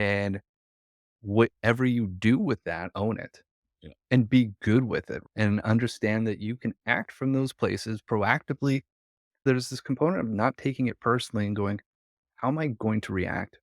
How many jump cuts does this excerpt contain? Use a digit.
1